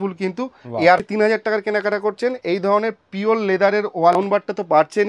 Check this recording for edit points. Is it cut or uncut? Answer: cut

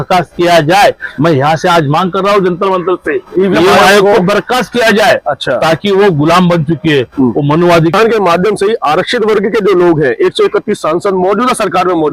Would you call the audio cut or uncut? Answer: cut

